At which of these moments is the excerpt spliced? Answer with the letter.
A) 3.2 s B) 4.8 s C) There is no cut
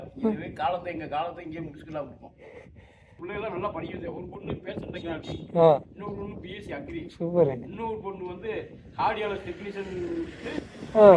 A